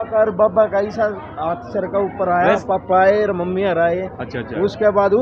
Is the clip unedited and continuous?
no; 1 cut; at 2.6 s

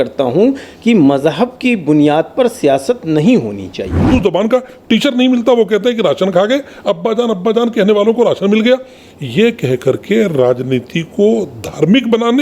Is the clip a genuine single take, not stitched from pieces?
no; 1 cut; at 4.0 s

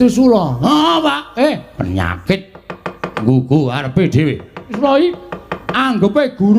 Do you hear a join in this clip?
yes; 1 cut; at 4.8 s

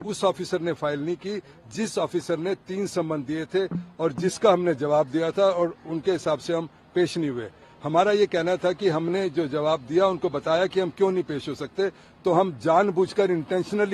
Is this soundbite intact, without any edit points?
yes; 0 cuts

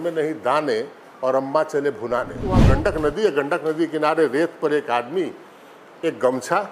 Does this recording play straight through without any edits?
no; 1 cut; at 2.6 s

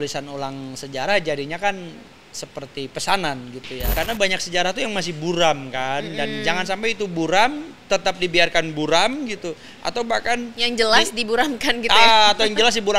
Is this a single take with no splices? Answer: no; 1 cut; at 3.8 s

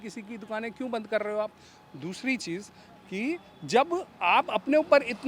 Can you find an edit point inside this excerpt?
no; 0 cuts

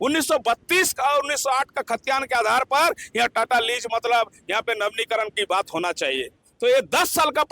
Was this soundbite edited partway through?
yes; 1 cut; at 6.5 s

